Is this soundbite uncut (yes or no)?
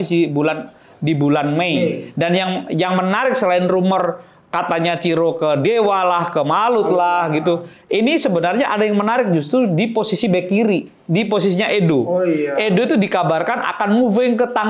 yes